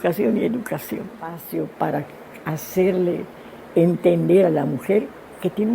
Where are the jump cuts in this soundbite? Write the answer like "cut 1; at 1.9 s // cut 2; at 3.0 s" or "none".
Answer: cut 1; at 1.4 s

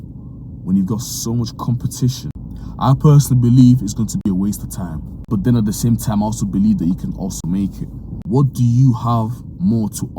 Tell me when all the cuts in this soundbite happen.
cut 1; at 2.3 s // cut 2; at 5.1 s // cut 3; at 8.1 s

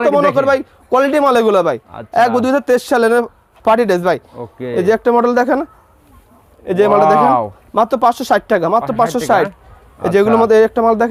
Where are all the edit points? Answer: none

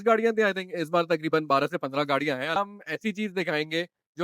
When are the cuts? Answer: cut 1; at 2.6 s

